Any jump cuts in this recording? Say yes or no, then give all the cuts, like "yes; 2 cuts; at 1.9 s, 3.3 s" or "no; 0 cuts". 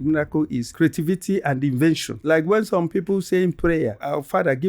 yes; 1 cut; at 2.1 s